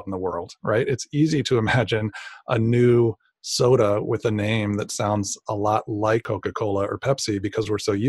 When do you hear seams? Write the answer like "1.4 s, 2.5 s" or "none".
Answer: 6.2 s